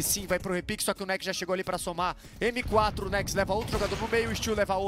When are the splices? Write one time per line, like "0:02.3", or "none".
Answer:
0:02.2